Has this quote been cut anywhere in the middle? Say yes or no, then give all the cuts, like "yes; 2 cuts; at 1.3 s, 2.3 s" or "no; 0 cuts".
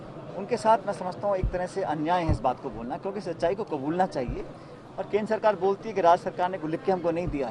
no; 0 cuts